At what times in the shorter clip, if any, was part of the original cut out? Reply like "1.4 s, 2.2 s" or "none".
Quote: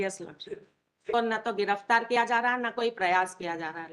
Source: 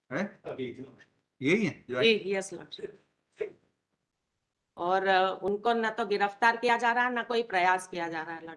1.1 s